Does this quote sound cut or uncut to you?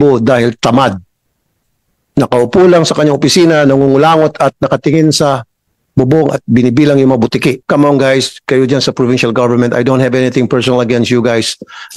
cut